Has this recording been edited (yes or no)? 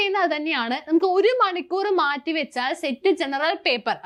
no